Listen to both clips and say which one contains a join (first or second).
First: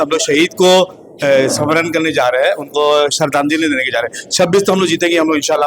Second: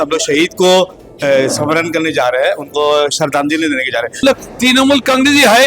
second